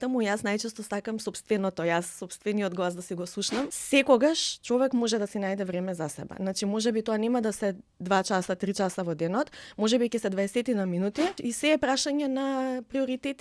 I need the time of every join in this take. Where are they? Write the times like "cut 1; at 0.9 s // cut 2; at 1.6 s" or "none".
cut 1; at 3.8 s // cut 2; at 11.4 s